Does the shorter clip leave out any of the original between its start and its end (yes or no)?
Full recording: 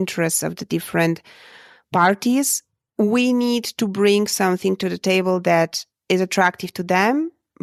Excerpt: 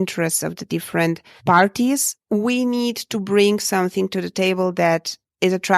yes